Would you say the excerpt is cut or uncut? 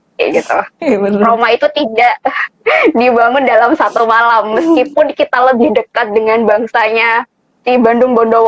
uncut